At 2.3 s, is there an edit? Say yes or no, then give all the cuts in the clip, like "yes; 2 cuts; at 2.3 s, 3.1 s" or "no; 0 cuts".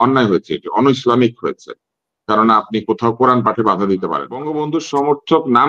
no; 1 cut; at 4.5 s